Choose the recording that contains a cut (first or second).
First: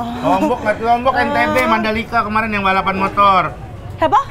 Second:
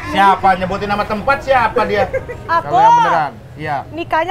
second